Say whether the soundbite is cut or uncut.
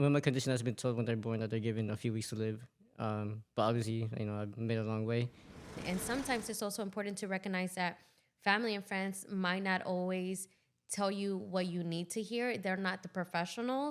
cut